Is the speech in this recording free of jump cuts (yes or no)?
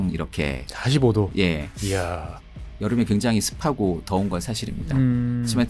yes